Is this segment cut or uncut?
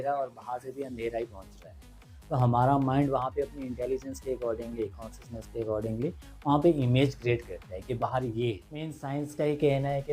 cut